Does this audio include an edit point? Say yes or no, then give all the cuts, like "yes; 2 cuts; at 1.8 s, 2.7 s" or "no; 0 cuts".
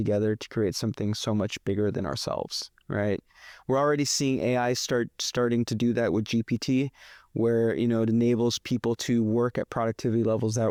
no; 0 cuts